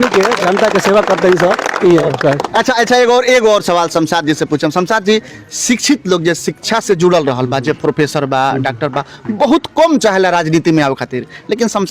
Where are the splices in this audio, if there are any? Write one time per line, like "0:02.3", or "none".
none

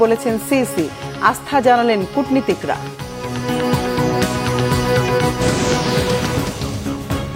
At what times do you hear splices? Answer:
0:06.3

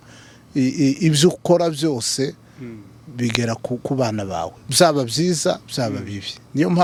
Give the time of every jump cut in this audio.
none

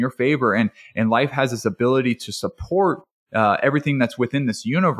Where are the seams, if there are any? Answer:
none

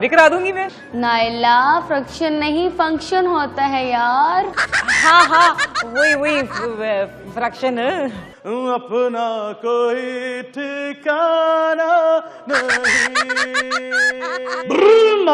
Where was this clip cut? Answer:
0:08.2

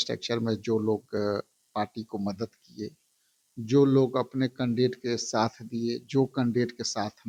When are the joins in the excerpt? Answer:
none

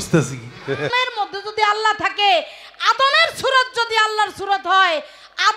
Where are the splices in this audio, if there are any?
0:00.9

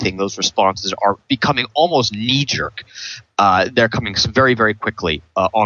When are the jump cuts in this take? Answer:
0:03.7

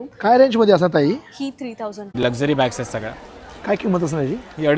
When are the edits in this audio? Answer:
0:02.2

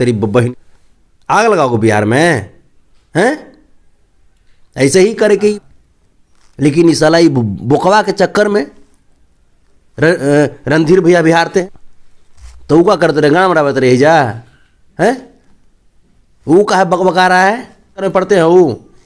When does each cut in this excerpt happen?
0:05.6
0:11.6
0:18.1

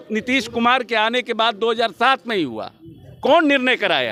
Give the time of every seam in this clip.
none

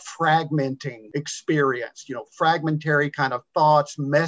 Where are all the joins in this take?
0:00.9

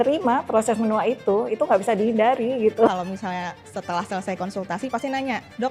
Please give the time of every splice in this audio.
0:02.9

